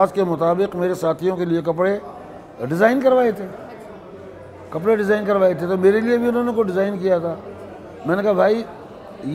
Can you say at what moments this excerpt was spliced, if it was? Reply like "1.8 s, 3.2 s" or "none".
none

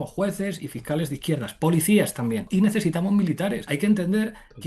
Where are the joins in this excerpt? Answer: 2.5 s, 3.7 s

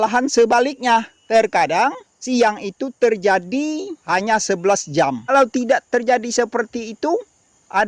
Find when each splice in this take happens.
1.2 s, 2.1 s, 3.9 s, 5.3 s

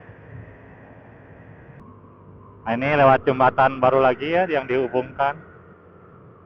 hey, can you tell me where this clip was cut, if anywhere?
1.8 s

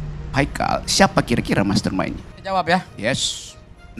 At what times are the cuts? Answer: 2.3 s

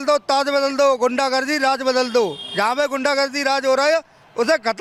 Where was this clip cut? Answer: none

